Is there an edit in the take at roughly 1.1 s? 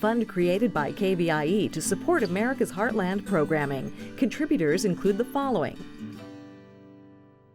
no; 1 cut; at 5.8 s

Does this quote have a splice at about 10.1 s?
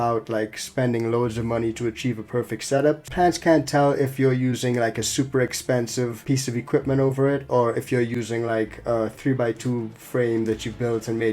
no; 2 cuts; at 3.1 s, 6.2 s

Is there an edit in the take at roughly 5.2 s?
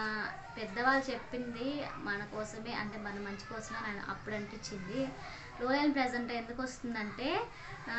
no; 0 cuts

